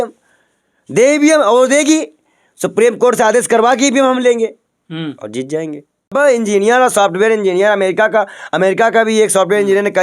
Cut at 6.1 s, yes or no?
yes